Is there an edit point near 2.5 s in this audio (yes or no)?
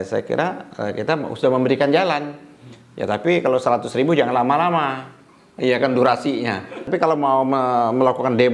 no